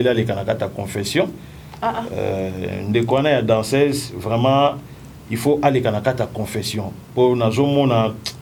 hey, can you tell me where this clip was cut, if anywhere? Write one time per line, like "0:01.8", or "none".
none